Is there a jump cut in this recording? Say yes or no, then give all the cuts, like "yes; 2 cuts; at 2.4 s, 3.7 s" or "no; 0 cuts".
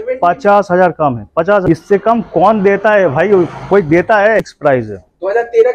yes; 2 cuts; at 1.7 s, 4.4 s